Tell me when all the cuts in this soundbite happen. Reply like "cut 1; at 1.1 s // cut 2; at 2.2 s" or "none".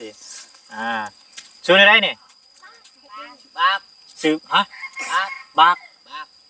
none

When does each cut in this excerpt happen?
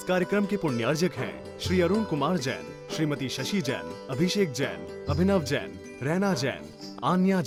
none

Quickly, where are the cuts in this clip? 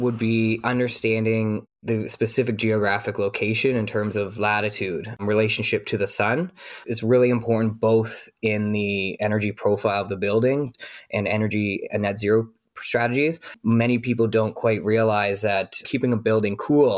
cut 1; at 9.1 s // cut 2; at 10.7 s // cut 3; at 13.5 s // cut 4; at 15.9 s

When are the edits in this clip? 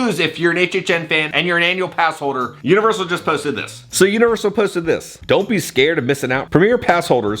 none

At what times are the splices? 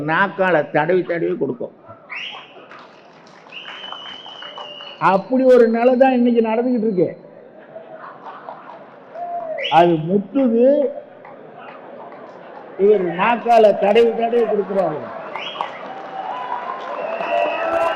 none

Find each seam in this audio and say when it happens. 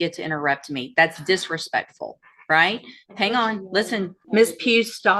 cut 1; at 4.2 s

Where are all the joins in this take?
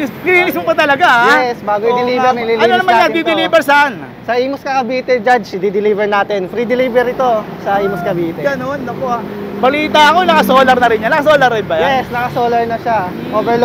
none

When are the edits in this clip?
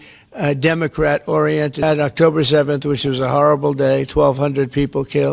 cut 1; at 1.8 s

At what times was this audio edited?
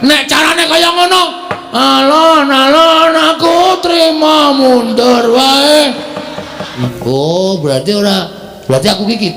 cut 1; at 6.9 s

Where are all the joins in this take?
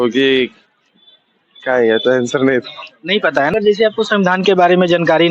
cut 1; at 3.5 s

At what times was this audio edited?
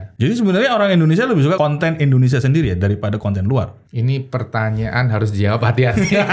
cut 1; at 1.6 s // cut 2; at 3.8 s

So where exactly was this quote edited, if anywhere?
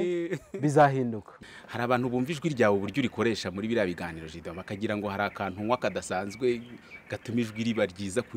cut 1; at 1.3 s

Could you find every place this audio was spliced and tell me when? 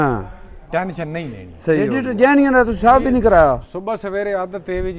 cut 1; at 1.9 s

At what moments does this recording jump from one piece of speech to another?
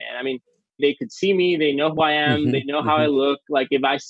cut 1; at 1.9 s

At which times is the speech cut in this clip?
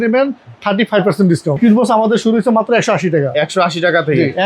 cut 1; at 1.6 s

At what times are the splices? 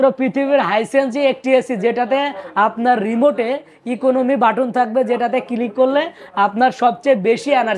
none

